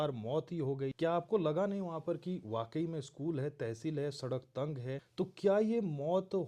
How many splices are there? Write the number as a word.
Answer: two